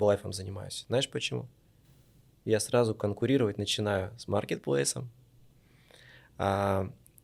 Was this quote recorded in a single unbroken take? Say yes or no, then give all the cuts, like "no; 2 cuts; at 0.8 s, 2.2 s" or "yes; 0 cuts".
yes; 0 cuts